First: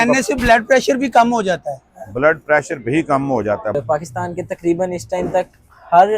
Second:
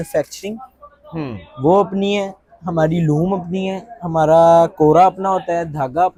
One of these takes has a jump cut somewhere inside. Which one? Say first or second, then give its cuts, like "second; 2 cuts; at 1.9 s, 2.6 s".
first; 1 cut; at 3.8 s